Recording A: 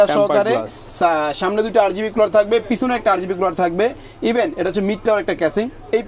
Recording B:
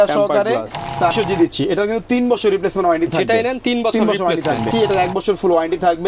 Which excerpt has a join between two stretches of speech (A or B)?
B